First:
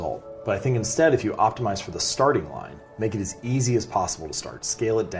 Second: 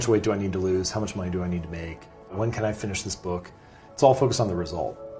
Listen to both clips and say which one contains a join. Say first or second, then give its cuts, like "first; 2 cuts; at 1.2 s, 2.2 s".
second; 1 cut; at 2.3 s